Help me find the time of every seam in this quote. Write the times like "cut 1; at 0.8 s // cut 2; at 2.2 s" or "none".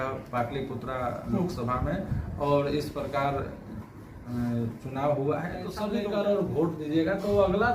cut 1; at 5.8 s